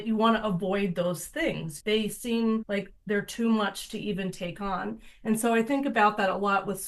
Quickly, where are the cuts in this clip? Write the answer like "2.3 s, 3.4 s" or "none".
1.7 s, 2.7 s